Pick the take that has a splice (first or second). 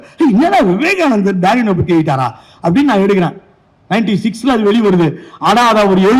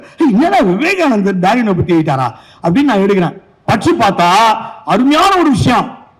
second